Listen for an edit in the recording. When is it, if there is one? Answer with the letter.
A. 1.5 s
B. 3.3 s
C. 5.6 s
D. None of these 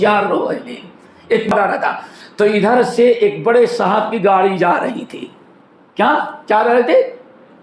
A